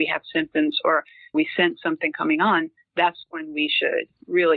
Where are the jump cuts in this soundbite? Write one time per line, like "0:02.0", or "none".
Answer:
0:01.3